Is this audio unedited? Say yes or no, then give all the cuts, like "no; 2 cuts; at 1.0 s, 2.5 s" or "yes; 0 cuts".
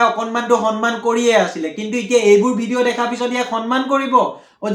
yes; 0 cuts